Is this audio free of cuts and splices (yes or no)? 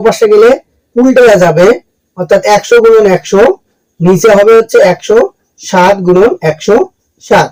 yes